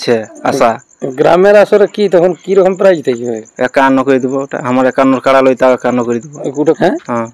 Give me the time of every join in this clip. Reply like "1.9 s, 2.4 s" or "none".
6.4 s